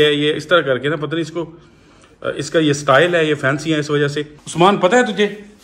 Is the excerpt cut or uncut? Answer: uncut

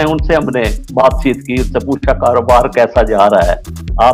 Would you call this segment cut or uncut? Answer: uncut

